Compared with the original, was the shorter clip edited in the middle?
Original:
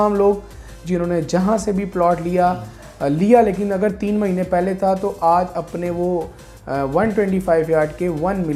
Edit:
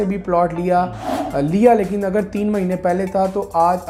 no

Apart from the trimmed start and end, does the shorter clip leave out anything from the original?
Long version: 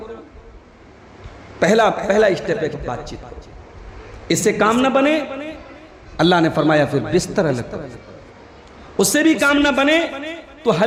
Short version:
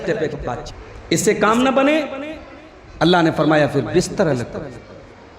yes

